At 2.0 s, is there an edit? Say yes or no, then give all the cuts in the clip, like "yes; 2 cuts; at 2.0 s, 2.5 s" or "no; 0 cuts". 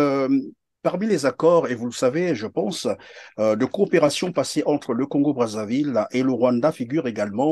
no; 0 cuts